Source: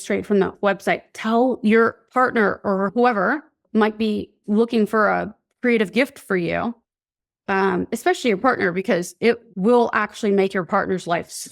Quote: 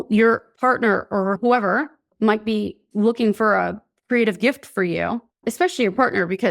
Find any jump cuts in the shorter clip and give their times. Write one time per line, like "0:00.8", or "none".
0:05.5